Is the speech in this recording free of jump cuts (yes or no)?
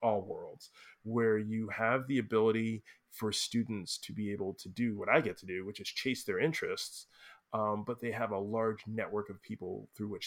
yes